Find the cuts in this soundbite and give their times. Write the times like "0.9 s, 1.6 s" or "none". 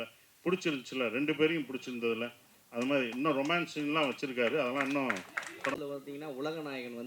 5.8 s